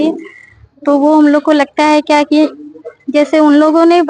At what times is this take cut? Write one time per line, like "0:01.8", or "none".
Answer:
none